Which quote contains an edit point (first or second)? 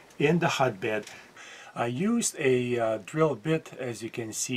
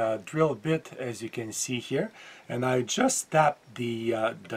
first